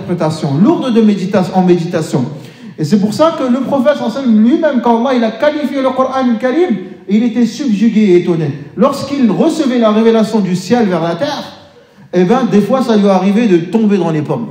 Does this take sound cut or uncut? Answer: uncut